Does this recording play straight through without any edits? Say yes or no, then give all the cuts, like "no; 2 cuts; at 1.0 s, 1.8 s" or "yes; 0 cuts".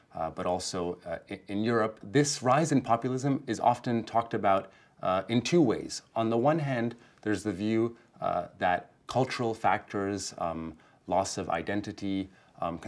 no; 1 cut; at 2.0 s